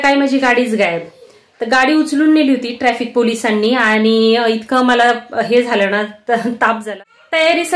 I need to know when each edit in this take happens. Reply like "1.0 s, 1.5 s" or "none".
6.8 s

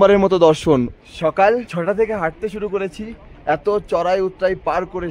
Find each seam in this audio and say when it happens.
0.9 s, 1.7 s

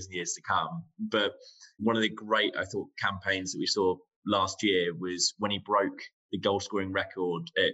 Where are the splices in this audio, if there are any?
1.8 s

